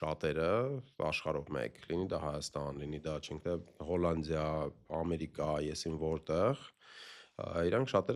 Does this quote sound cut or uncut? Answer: uncut